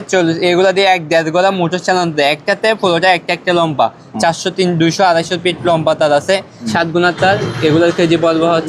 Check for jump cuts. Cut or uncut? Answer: cut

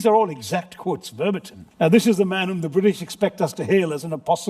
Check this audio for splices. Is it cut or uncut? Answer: cut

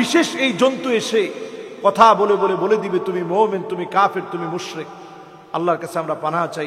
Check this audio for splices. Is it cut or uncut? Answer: uncut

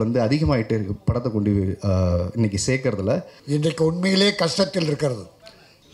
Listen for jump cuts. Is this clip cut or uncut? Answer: cut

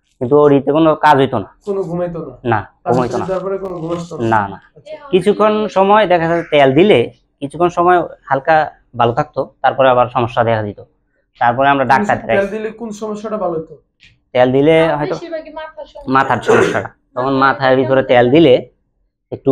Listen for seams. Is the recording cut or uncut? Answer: uncut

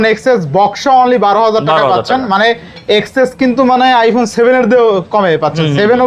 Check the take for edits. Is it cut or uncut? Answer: uncut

